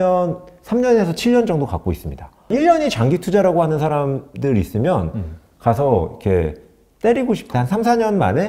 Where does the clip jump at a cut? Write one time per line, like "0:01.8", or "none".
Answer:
0:02.5
0:07.5